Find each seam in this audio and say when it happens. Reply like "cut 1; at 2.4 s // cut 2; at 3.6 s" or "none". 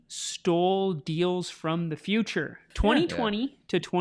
cut 1; at 2.7 s